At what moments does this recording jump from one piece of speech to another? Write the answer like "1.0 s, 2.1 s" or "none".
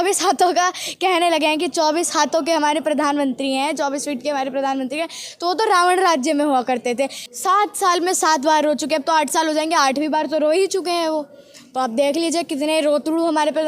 7.2 s